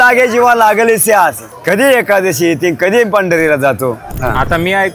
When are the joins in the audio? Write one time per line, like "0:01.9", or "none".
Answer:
0:01.5
0:04.1